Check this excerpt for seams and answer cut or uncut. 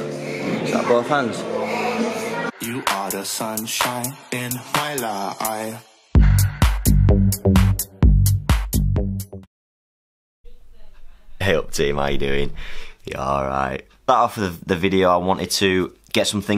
cut